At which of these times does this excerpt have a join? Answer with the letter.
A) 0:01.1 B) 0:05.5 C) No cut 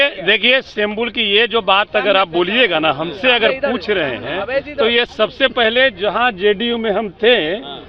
C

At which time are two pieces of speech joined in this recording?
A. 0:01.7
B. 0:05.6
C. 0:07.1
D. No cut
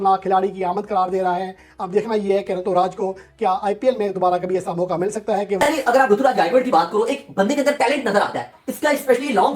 B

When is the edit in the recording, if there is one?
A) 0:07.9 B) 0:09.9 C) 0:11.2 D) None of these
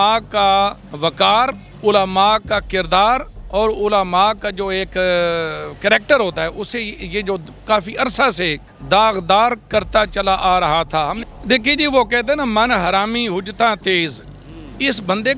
C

